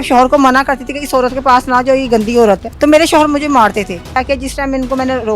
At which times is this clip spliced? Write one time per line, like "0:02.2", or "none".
0:02.7
0:04.2